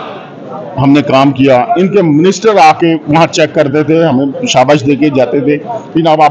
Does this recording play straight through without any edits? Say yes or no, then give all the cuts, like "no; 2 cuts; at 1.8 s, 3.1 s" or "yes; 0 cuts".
yes; 0 cuts